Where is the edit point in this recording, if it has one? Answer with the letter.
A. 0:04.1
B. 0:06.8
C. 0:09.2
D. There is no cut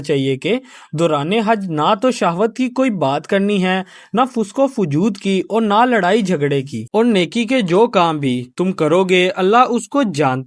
B